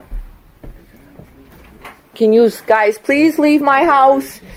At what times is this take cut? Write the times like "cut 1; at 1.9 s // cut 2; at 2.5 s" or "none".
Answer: none